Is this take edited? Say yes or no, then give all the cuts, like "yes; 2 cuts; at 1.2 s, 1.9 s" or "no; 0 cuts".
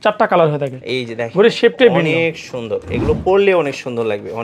no; 0 cuts